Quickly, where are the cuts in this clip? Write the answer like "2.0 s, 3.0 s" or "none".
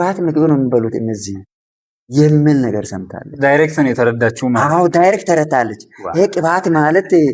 none